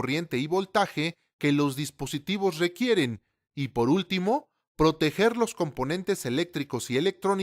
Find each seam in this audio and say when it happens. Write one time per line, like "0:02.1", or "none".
0:02.8